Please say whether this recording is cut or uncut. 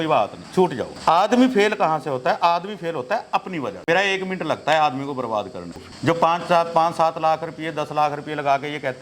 cut